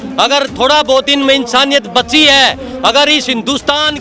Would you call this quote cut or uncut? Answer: uncut